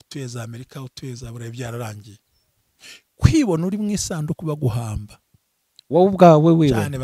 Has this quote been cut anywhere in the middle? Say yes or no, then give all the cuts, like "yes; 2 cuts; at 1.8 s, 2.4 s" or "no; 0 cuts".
no; 0 cuts